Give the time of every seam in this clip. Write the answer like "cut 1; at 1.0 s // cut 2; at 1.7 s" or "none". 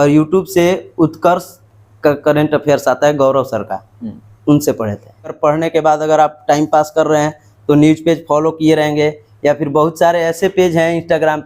cut 1; at 5.4 s